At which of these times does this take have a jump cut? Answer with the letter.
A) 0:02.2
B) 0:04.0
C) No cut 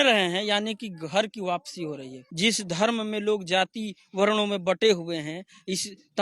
A